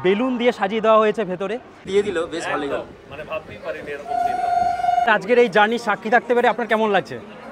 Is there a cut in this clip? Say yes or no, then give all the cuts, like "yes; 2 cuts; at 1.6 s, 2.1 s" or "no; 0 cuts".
yes; 2 cuts; at 1.9 s, 5.1 s